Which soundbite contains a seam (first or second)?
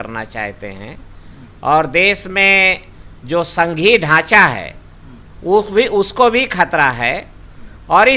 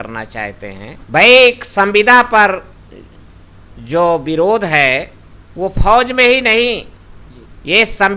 second